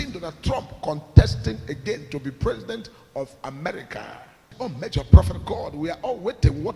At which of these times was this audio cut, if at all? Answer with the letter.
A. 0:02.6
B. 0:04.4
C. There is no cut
B